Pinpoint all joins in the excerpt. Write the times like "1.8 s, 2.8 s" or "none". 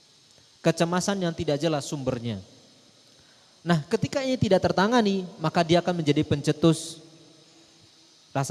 none

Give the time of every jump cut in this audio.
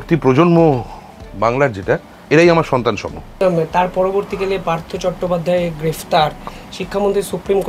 2.1 s, 3.2 s, 6.5 s

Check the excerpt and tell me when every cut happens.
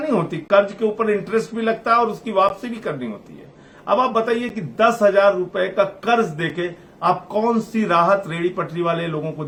none

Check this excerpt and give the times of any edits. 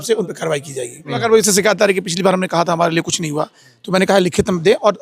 1.1 s

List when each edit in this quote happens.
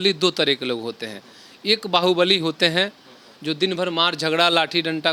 none

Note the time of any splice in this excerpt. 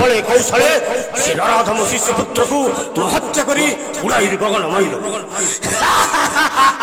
none

